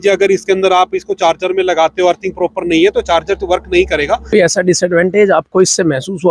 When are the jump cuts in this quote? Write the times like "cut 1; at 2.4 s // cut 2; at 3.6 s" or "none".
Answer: cut 1; at 4.3 s